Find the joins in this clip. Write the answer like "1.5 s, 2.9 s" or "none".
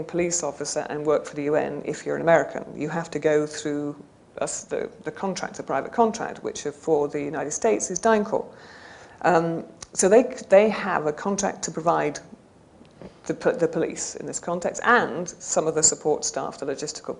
none